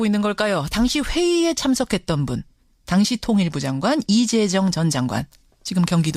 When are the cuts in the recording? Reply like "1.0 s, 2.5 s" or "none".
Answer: 4.9 s